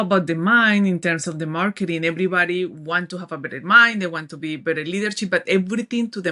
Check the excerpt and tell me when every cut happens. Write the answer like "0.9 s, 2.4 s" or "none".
none